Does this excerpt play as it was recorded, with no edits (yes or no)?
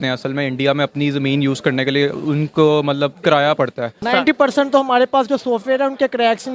no